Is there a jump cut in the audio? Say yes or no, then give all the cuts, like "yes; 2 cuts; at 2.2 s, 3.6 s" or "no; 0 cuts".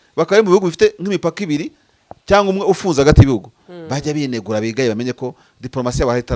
no; 0 cuts